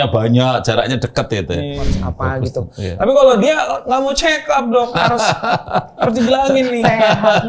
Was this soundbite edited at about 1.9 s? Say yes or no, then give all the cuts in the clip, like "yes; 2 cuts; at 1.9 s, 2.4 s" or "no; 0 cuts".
yes; 1 cut; at 1.9 s